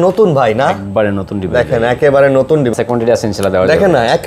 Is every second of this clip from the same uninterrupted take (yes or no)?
no